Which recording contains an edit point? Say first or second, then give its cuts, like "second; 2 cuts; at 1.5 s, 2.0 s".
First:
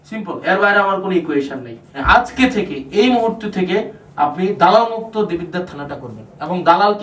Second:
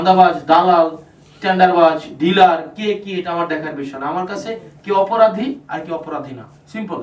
first; 1 cut; at 2.0 s